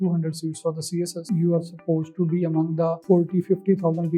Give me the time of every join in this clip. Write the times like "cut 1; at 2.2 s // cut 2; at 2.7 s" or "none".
cut 1; at 1.2 s // cut 2; at 3.0 s

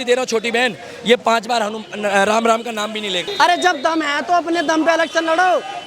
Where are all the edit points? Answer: cut 1; at 3.3 s

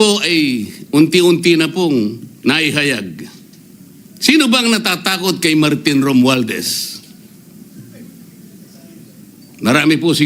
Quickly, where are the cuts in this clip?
none

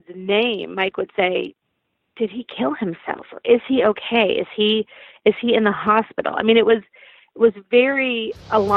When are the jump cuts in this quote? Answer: none

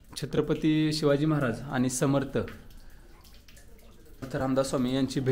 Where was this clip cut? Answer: cut 1; at 4.2 s

